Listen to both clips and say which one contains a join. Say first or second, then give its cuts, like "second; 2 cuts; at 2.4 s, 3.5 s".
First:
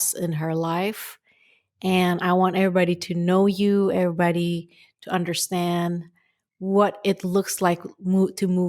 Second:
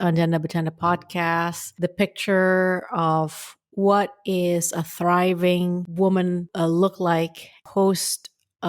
second; 4 cuts; at 1.6 s, 5.9 s, 6.5 s, 7.6 s